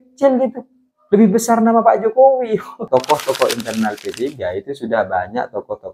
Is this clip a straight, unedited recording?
no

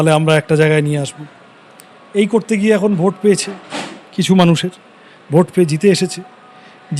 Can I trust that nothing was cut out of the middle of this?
yes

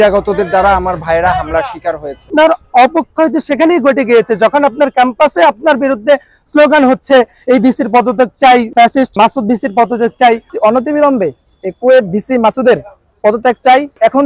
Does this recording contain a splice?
yes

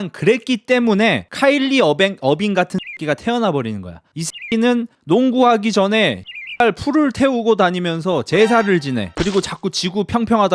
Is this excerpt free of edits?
no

